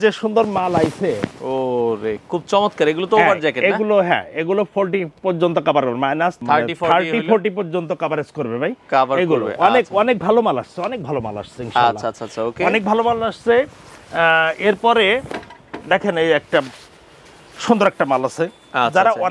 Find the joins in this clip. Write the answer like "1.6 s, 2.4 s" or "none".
none